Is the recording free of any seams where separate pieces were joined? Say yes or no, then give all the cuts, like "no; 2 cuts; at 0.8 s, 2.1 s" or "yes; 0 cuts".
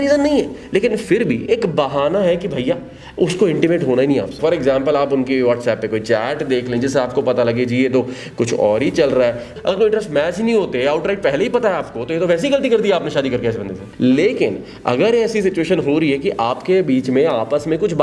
no; 3 cuts; at 4.4 s, 9.5 s, 13.8 s